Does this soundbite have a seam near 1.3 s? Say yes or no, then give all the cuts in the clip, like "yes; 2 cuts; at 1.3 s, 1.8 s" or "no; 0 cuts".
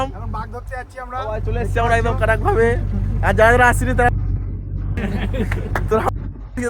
no; 1 cut; at 5.0 s